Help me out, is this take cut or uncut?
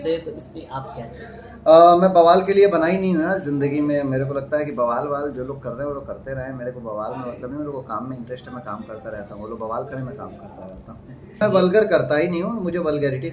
cut